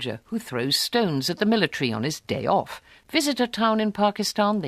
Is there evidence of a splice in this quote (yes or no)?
yes